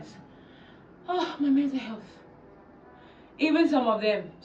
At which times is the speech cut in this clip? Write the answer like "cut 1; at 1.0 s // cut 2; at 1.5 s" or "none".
none